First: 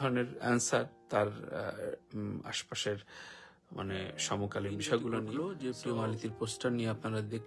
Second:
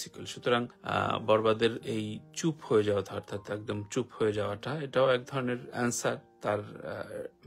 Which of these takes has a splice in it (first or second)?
first